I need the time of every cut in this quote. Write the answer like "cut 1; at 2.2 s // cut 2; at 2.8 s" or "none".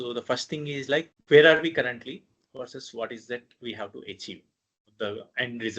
cut 1; at 1.1 s